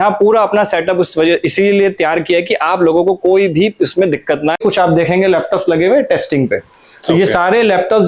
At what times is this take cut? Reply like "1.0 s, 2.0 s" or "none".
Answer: 4.6 s